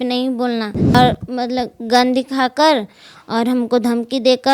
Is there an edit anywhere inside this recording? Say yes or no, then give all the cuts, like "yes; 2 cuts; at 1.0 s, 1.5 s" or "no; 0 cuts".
yes; 1 cut; at 0.9 s